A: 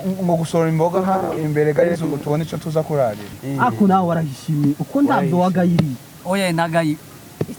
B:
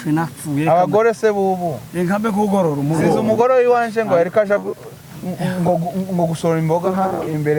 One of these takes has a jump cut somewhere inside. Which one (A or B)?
A